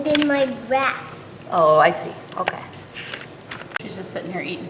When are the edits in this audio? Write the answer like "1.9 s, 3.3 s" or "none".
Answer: 3.8 s